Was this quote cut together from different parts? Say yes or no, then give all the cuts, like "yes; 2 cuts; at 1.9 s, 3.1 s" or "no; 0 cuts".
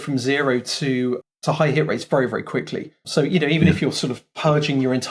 yes; 2 cuts; at 1.2 s, 3.0 s